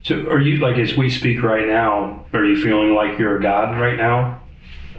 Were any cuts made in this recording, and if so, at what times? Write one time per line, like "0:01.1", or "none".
0:02.2